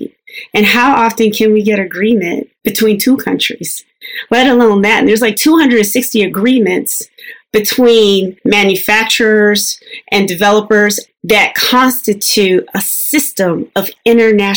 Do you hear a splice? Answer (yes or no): yes